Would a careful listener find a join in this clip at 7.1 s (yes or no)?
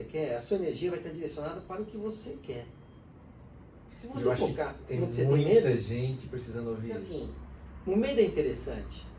yes